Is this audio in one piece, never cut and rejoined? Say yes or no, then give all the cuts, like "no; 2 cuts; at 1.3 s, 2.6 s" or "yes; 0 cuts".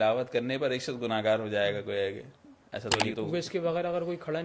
no; 1 cut; at 3.0 s